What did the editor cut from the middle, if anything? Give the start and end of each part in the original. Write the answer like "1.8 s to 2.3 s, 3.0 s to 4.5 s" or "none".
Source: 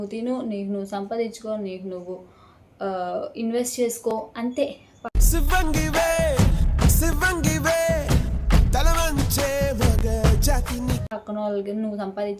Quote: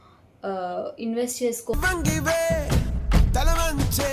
4.1 s to 7.1 s

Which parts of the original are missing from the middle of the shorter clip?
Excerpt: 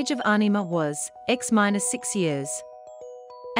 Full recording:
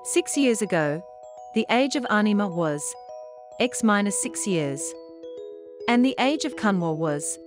2.9 s to 3.4 s

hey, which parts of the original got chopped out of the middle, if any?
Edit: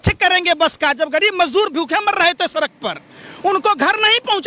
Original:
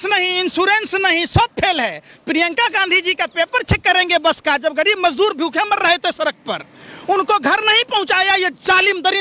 none

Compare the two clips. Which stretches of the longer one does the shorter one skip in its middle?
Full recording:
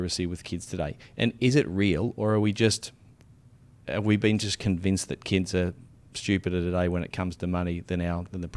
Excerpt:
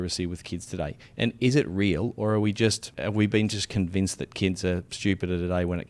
2.9 s to 3.8 s, 5.8 s to 6.1 s

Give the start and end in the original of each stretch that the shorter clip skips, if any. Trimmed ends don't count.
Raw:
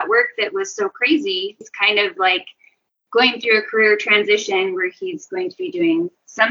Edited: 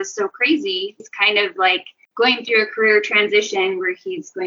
2.6 s to 2.9 s

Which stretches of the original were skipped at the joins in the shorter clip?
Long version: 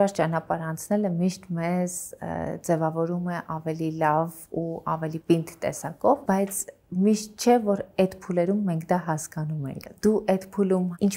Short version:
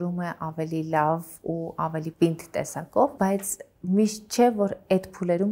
none

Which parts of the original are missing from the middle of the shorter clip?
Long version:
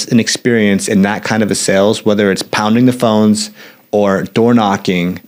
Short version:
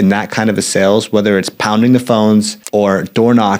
3.5 s to 3.8 s

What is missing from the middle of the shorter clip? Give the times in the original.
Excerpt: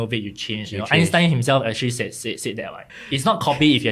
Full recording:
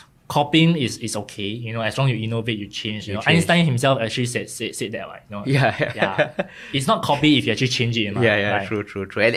5.3 s to 6.6 s

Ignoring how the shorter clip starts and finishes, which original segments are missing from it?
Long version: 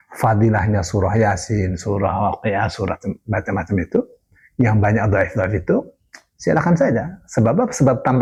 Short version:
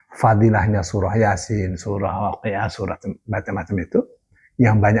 none

